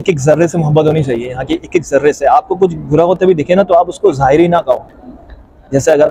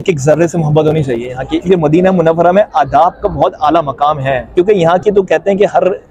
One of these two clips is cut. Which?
second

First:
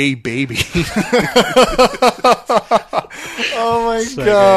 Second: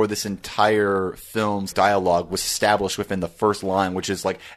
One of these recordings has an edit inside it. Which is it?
second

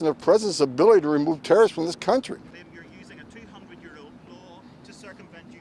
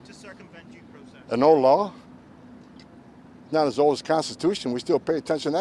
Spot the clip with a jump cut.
first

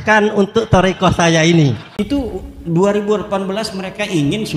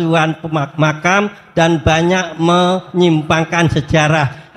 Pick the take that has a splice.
first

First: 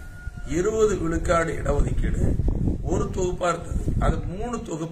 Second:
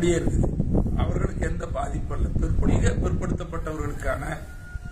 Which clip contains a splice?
second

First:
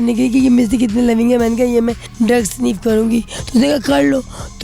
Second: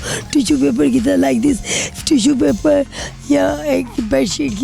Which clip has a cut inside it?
first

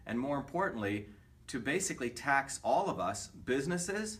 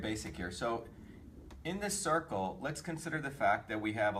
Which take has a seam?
first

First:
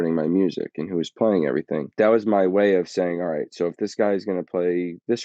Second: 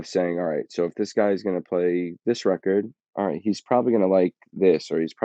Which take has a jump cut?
first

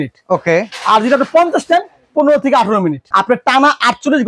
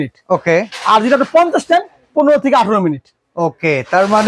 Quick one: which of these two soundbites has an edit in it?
first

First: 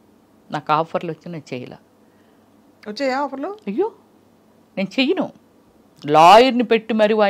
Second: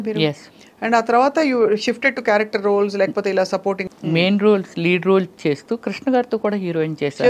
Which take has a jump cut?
second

